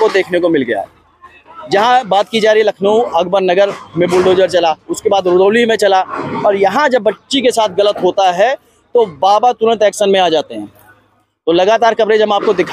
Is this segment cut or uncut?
uncut